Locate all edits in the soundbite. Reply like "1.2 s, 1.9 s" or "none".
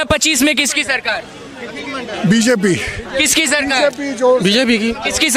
none